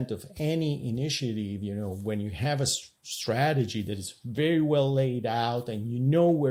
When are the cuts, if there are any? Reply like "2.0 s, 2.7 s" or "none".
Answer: none